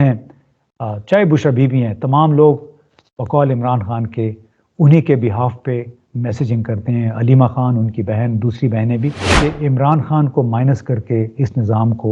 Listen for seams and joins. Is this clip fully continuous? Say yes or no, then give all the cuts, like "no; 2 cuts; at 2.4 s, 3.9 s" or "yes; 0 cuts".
no; 1 cut; at 9.2 s